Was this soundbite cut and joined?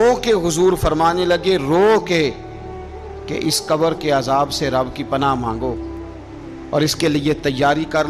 no; 0 cuts

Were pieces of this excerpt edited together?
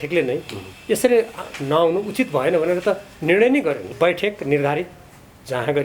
yes; 1 cut; at 3.8 s

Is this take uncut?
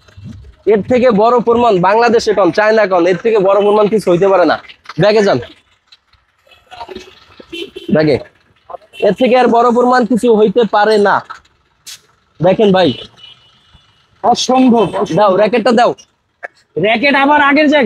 yes; 0 cuts

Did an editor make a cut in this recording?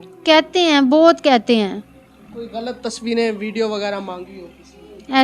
no; 0 cuts

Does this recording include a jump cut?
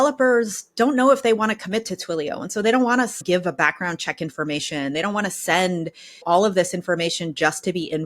yes; 2 cuts; at 3.2 s, 6.2 s

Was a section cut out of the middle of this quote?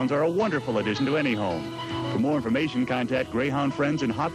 yes; 1 cut; at 2.9 s

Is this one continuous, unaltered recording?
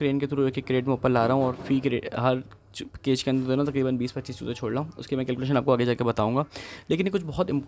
yes; 0 cuts

